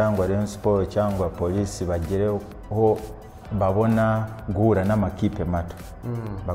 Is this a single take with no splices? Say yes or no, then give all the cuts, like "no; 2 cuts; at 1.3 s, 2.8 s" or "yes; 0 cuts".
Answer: yes; 0 cuts